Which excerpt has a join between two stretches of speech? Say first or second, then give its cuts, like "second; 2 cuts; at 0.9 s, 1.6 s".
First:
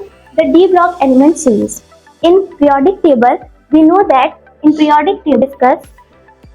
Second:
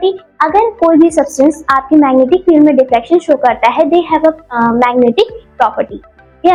first; 1 cut; at 5.4 s